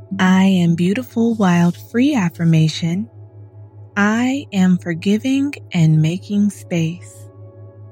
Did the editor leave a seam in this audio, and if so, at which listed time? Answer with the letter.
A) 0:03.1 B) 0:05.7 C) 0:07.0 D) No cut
C